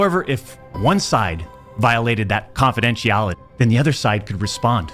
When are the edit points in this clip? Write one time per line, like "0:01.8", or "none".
0:03.4